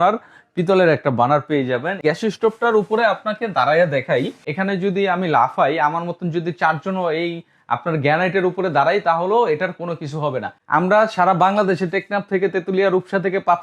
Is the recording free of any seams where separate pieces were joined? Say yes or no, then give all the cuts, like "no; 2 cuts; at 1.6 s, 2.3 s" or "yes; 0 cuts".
no; 3 cuts; at 2.0 s, 4.4 s, 10.6 s